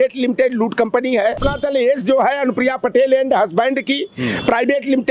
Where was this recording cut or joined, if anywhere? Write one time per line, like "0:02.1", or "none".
0:01.4